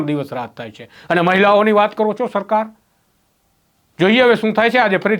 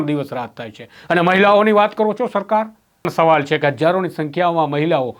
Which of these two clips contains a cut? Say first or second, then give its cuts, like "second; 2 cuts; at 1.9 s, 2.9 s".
second; 1 cut; at 3.1 s